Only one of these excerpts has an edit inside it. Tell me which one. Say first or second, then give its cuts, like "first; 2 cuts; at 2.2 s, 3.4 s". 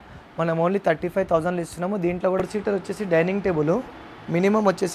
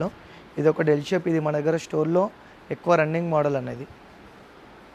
first; 1 cut; at 2.4 s